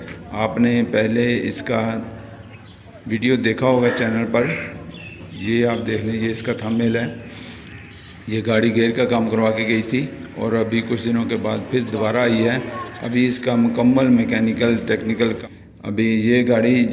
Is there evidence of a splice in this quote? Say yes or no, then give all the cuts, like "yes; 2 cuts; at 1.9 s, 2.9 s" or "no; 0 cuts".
yes; 1 cut; at 15.4 s